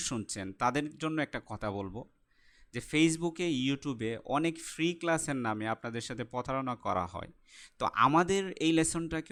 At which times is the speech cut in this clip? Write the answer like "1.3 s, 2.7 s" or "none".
none